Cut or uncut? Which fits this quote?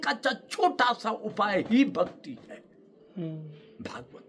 uncut